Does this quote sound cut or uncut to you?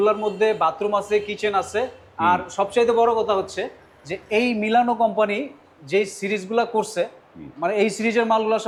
uncut